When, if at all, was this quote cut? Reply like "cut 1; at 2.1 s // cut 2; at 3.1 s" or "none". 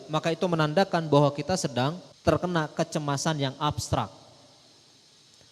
cut 1; at 2.1 s